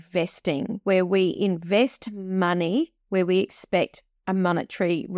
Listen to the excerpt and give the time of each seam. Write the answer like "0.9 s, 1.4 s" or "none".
none